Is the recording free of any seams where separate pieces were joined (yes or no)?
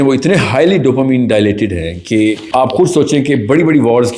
no